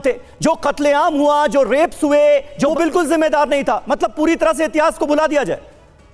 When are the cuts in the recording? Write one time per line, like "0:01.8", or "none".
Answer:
0:02.7